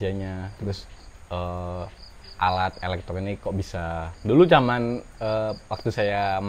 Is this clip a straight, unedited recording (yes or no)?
no